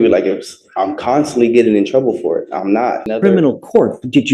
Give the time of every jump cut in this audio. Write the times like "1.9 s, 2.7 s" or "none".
3.1 s